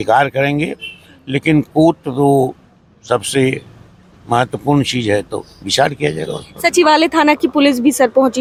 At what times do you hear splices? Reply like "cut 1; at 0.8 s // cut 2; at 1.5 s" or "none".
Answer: none